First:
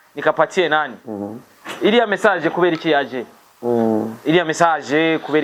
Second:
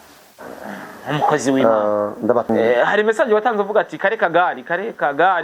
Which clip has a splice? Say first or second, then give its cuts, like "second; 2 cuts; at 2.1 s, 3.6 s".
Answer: second; 1 cut; at 2.5 s